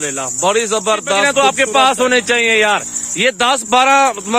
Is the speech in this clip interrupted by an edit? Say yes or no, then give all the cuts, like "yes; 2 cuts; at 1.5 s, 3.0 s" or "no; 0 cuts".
yes; 1 cut; at 1.2 s